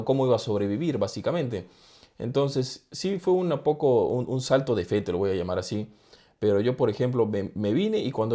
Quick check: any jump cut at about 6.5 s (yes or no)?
no